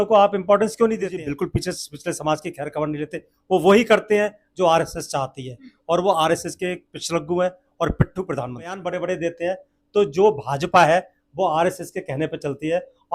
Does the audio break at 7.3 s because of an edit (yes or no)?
no